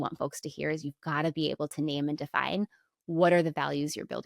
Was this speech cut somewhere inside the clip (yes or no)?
no